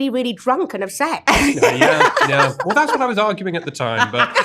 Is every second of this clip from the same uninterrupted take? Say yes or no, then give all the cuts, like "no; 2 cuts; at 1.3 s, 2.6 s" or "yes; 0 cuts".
yes; 0 cuts